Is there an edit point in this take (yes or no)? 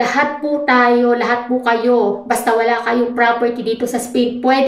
no